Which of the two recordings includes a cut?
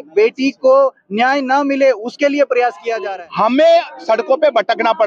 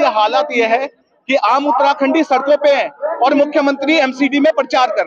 first; 1 cut; at 2.9 s

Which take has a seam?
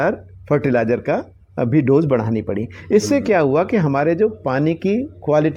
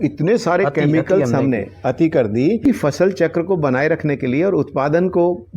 second; 1 cut; at 2.7 s

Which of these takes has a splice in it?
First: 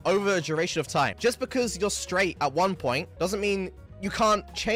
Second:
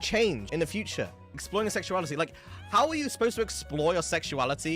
second; 1 cut; at 1.4 s

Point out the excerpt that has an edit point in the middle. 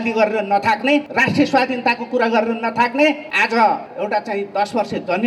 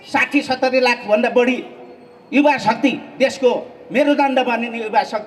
first; 3 cuts; at 1.1 s, 3.3 s, 3.9 s

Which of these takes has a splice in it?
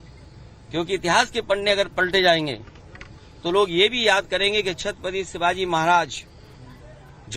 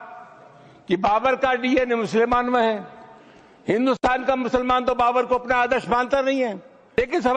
first; 1 cut; at 4.0 s

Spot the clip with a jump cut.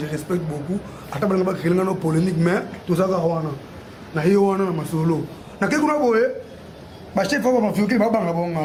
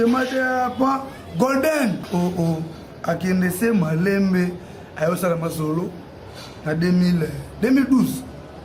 second; 1 cut; at 2.1 s

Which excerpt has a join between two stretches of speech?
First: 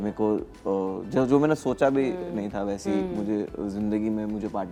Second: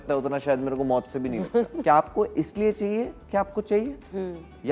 second; 1 cut; at 1.8 s

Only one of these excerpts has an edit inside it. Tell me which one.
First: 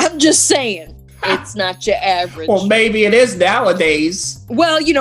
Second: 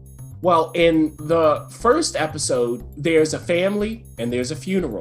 second; 1 cut; at 1.2 s

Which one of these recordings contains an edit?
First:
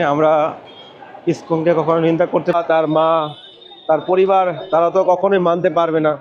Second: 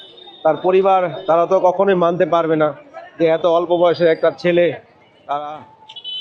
first; 1 cut; at 2.5 s

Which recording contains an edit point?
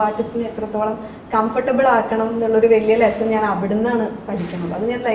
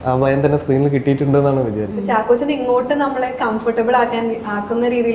second; 1 cut; at 2.0 s

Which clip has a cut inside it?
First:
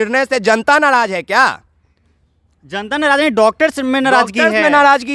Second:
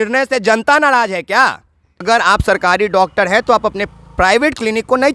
second; 1 cut; at 2.0 s

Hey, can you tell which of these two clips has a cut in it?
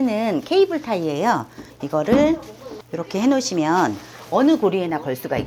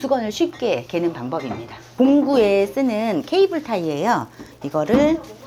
second; 1 cut; at 1.8 s

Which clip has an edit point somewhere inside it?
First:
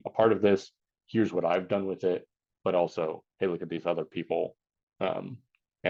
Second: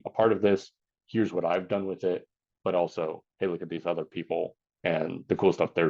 second; 1 cut; at 4.6 s

